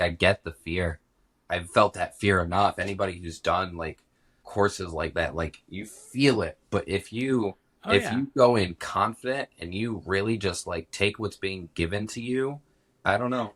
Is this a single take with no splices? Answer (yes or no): yes